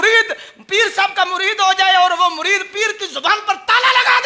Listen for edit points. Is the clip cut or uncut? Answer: uncut